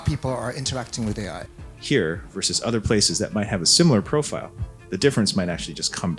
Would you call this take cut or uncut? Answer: cut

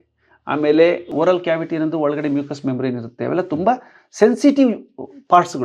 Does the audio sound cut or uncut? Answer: cut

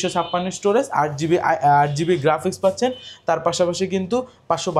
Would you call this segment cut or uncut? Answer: uncut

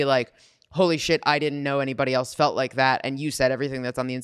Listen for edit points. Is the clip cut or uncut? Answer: uncut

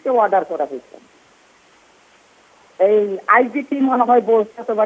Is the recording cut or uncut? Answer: uncut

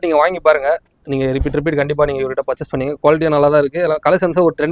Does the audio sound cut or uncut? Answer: uncut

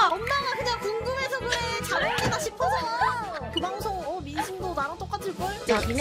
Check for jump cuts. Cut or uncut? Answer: uncut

